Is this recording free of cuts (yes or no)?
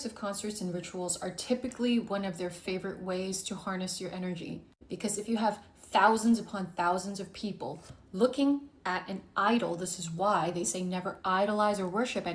yes